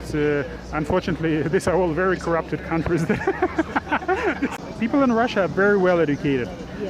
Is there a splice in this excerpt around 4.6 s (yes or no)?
yes